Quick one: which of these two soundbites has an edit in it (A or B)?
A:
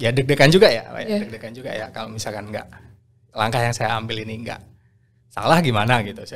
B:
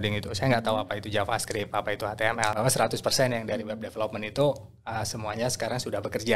B